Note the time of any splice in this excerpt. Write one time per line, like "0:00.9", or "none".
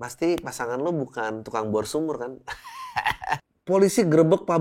0:03.5